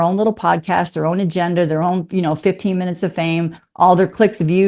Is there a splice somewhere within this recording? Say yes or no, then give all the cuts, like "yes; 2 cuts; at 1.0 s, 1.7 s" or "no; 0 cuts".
no; 0 cuts